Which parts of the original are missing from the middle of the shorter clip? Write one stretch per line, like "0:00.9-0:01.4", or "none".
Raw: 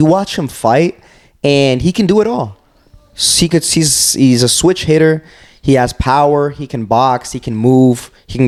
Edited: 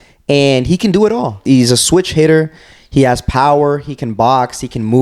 0:02.5-0:04.1